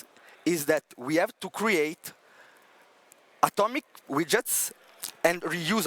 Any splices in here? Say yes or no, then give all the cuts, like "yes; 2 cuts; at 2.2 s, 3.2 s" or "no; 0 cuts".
no; 0 cuts